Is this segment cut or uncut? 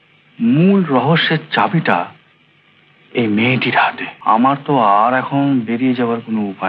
cut